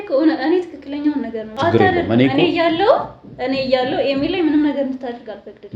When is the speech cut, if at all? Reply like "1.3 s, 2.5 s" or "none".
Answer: 1.4 s